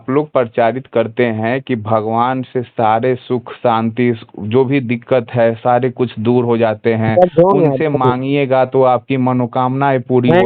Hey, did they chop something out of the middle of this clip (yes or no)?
no